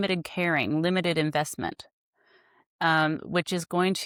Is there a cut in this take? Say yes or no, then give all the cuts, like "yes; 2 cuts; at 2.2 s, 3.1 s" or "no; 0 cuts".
no; 0 cuts